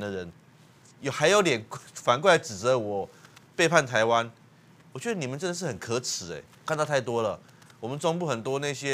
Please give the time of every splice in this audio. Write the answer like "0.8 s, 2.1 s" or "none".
6.5 s